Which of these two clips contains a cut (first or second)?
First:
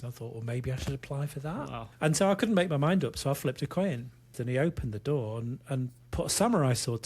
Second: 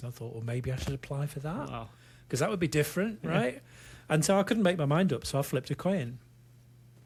first